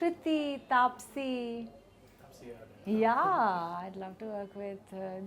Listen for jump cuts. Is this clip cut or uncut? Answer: uncut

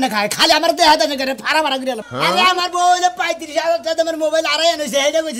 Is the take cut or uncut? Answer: cut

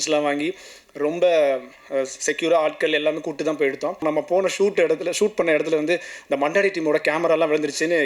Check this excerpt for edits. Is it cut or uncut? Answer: cut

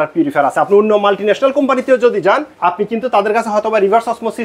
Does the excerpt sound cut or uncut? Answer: cut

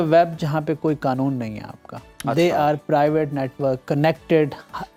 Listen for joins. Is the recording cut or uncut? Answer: uncut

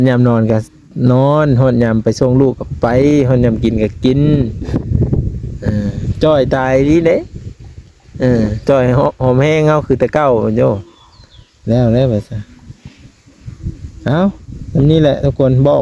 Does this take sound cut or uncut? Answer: uncut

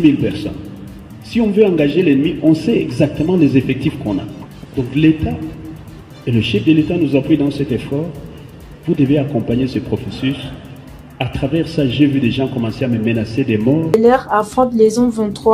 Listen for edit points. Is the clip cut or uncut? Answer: cut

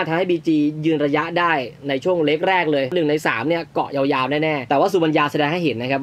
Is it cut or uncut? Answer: cut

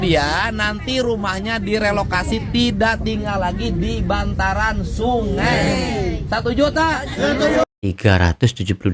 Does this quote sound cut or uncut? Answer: cut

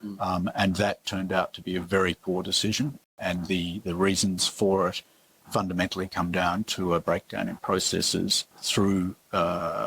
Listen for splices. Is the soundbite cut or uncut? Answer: cut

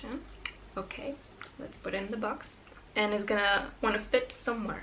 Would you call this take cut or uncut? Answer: cut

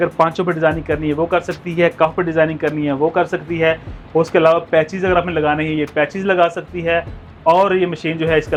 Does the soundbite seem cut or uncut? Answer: uncut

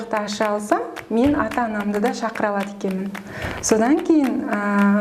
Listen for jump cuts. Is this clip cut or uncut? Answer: uncut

